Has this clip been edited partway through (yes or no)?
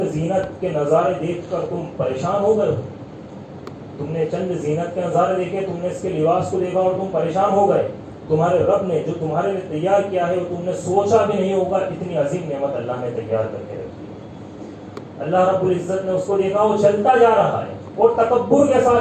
no